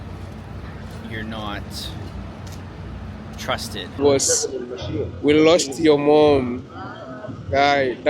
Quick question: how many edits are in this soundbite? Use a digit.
1